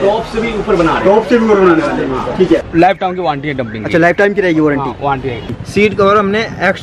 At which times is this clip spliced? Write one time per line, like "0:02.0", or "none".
0:02.7
0:05.5